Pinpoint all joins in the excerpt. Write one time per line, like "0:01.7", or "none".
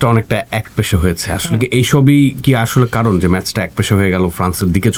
none

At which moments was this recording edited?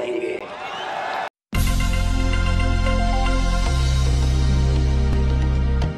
0:01.3

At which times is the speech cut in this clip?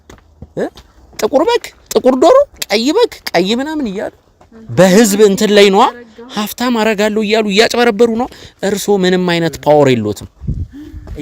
0:01.8

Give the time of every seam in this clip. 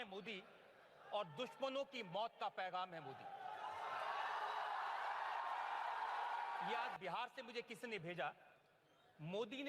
0:06.9

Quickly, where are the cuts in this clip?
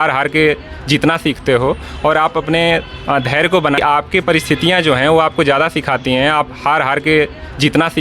0:03.8

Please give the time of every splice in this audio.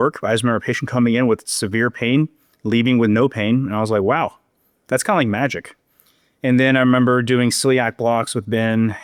none

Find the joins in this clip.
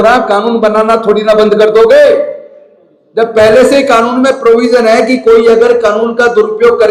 none

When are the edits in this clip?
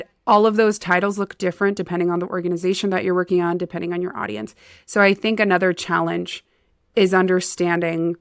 none

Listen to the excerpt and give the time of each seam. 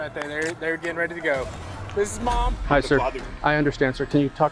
0:02.5

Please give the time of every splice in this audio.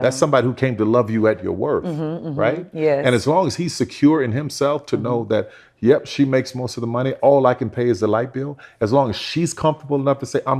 none

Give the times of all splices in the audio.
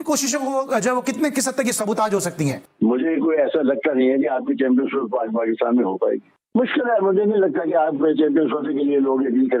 none

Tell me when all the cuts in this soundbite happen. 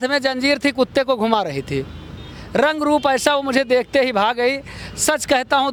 none

